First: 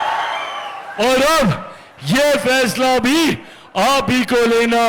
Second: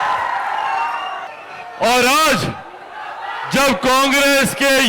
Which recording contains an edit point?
second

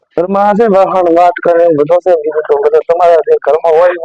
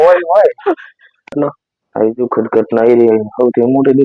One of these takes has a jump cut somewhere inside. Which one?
second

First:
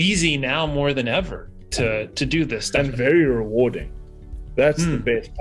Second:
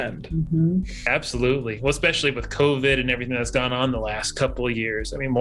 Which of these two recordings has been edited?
first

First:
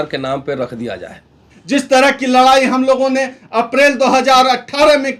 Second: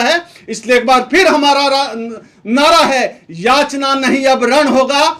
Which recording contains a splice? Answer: first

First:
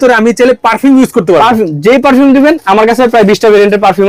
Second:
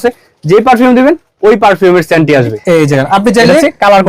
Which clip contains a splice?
second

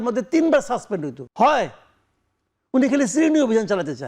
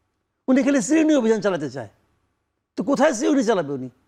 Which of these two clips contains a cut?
first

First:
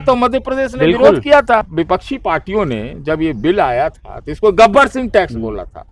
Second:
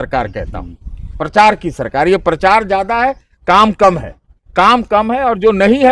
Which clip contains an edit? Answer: first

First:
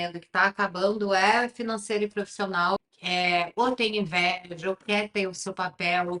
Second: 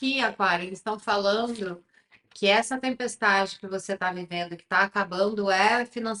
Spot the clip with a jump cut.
first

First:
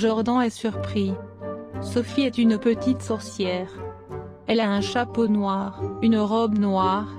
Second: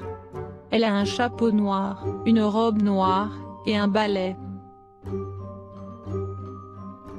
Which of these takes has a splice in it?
second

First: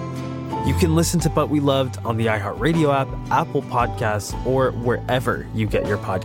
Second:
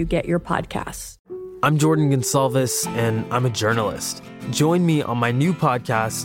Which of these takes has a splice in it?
second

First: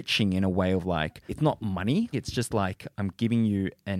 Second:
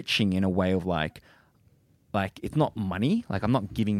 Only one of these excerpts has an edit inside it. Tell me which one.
first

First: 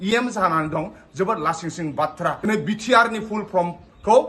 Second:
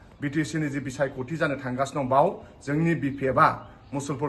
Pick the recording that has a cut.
first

